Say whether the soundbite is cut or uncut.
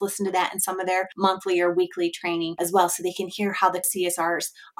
cut